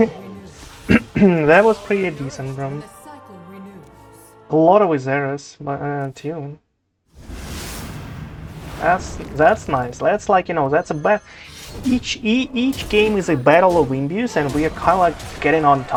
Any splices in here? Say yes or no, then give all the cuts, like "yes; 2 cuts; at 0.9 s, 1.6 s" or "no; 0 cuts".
no; 0 cuts